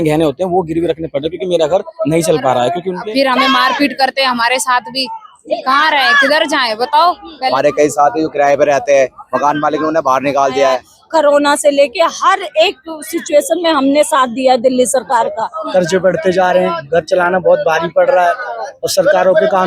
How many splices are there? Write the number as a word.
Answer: four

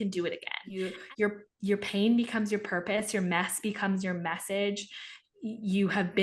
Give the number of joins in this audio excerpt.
one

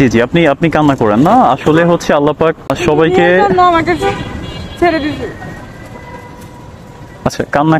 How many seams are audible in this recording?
one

